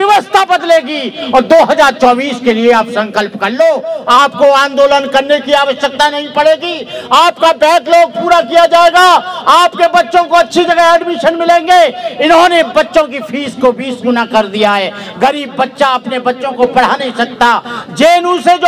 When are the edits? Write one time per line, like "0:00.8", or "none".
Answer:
none